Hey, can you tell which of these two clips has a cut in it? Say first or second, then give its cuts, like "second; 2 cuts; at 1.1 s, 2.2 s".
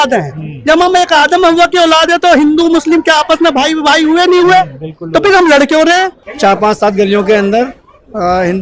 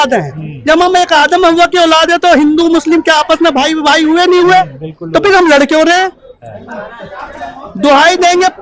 first; 1 cut; at 6.2 s